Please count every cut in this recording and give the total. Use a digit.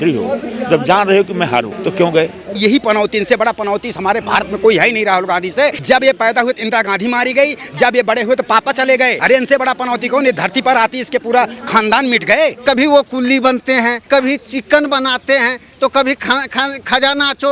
6